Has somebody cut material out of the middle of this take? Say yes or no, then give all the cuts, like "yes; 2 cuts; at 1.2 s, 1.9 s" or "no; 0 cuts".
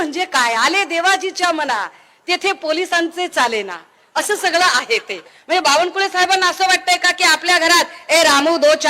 yes; 1 cut; at 5.3 s